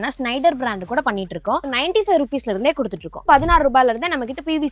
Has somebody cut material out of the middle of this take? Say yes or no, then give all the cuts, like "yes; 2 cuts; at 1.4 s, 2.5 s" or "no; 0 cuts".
yes; 2 cuts; at 1.6 s, 3.1 s